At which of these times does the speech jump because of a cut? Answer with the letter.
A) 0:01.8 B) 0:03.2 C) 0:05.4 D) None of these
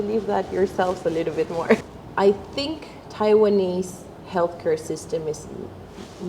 A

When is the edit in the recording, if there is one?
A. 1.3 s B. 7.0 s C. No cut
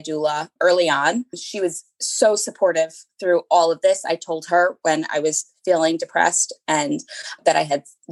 A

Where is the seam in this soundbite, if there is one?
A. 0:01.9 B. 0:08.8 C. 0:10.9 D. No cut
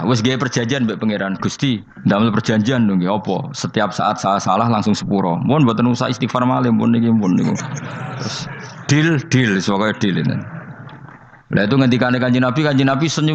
A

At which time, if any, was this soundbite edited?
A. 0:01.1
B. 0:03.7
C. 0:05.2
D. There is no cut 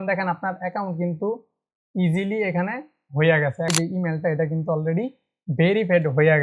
B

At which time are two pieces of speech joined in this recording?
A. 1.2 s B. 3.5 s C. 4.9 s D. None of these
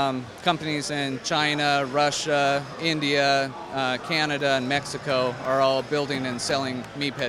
D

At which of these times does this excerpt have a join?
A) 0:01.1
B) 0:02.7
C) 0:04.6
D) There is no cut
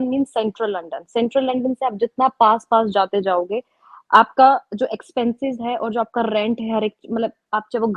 D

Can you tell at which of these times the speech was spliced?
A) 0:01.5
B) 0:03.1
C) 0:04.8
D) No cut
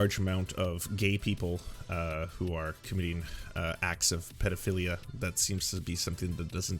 D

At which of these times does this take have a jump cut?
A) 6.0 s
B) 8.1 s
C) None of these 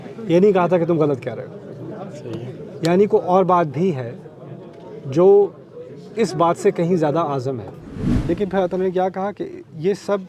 B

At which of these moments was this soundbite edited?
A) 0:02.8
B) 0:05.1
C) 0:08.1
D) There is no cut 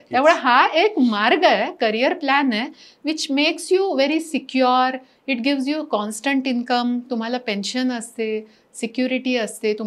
D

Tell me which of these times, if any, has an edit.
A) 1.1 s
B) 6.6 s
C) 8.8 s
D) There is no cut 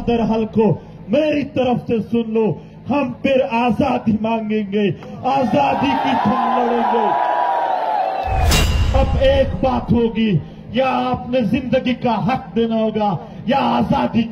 C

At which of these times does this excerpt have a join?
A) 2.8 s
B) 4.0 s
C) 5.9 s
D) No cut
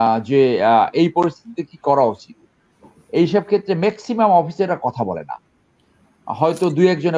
D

